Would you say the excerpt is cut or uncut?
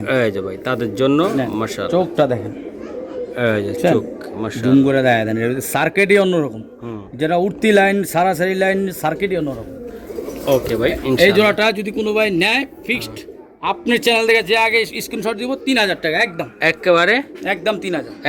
uncut